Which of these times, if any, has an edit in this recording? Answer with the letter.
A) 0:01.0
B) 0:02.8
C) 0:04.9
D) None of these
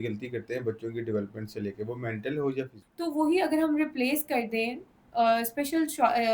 B